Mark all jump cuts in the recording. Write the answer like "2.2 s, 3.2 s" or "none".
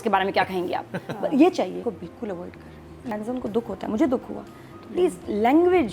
1.8 s, 3.1 s